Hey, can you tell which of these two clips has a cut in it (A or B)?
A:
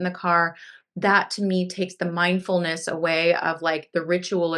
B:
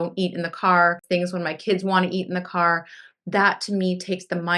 B